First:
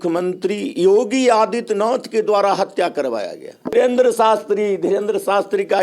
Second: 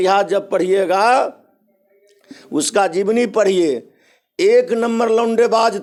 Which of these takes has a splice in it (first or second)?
first